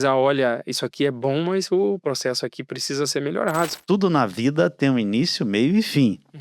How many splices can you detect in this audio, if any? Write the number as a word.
one